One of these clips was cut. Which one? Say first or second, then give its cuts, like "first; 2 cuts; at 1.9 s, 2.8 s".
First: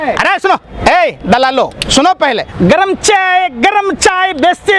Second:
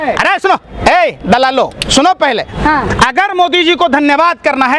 first; 1 cut; at 2.5 s